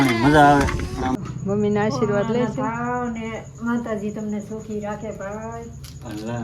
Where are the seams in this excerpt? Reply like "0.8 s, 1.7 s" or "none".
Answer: 1.3 s